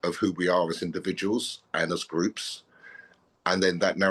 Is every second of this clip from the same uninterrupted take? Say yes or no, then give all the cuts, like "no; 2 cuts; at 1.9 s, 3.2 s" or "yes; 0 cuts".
yes; 0 cuts